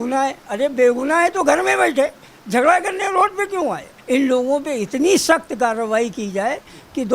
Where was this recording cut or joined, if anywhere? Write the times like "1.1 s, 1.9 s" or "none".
3.9 s